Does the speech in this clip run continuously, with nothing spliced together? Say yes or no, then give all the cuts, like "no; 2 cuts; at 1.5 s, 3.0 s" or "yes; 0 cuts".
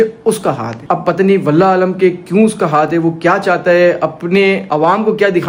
yes; 0 cuts